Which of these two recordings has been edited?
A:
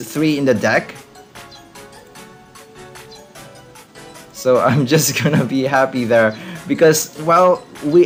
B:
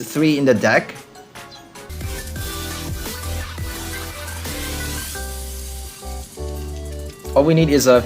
B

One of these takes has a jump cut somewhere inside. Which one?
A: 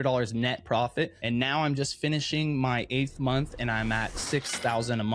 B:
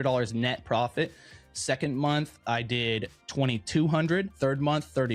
A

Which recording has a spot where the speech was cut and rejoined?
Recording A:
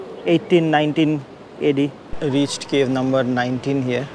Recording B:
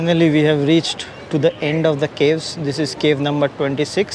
A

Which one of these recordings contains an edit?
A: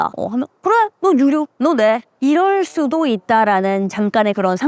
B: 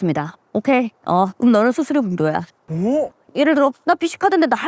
B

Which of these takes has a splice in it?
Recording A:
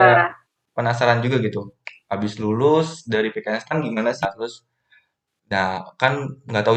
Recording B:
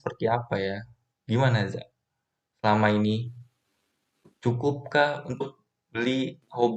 A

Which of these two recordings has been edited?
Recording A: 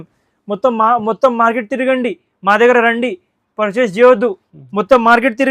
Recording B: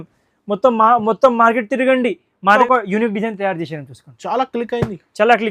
B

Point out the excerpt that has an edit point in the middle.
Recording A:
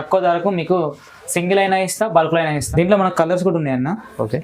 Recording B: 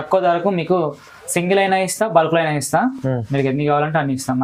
A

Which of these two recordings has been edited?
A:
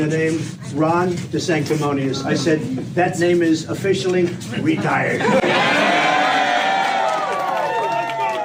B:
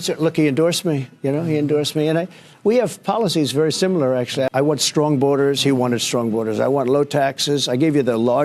B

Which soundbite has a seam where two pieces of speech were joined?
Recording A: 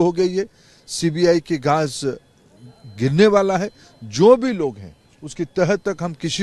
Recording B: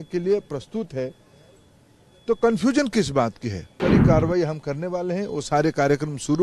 B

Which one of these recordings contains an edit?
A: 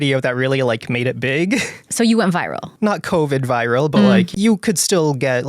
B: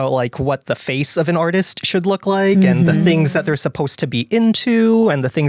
A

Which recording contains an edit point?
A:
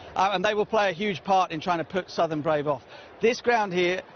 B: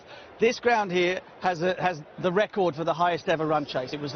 A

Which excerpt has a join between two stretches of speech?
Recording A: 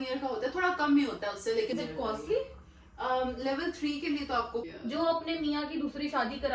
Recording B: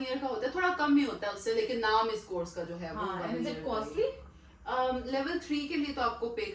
A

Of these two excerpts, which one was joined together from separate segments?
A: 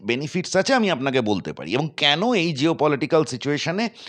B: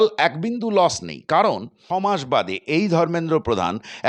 B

